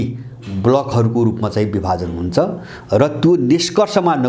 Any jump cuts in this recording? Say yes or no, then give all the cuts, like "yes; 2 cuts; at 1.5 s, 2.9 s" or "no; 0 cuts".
no; 0 cuts